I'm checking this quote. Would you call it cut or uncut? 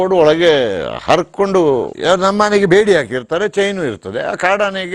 cut